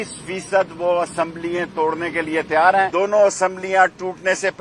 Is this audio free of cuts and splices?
no; 1 cut; at 2.9 s

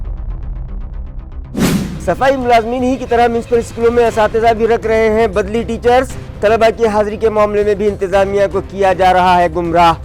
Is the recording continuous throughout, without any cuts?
yes; 0 cuts

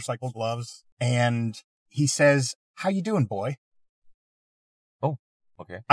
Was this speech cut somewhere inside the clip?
no; 0 cuts

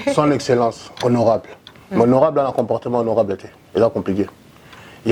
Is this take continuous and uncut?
yes; 0 cuts

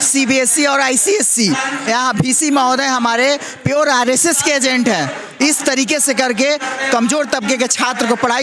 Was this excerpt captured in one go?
yes; 0 cuts

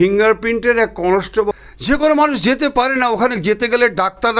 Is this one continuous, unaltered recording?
no; 1 cut; at 1.5 s

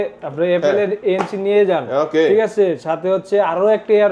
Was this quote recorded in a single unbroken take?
yes; 0 cuts

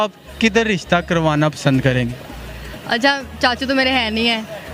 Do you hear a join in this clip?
no; 0 cuts

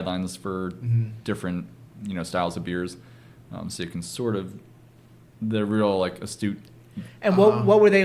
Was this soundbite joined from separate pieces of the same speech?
no; 0 cuts

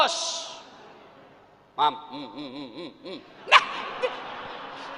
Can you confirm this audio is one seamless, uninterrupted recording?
yes; 0 cuts

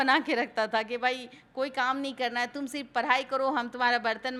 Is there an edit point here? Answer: no; 0 cuts

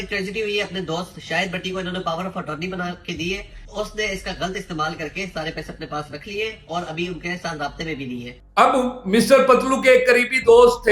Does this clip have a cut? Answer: yes; 2 cuts; at 3.6 s, 8.3 s

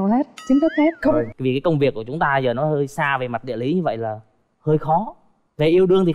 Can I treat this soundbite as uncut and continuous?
no; 1 cut; at 1.3 s

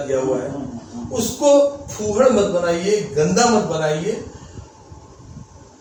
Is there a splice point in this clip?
no; 0 cuts

